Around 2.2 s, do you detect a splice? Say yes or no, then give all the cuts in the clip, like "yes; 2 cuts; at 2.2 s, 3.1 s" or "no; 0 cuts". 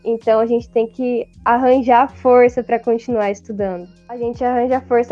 no; 1 cut; at 4.0 s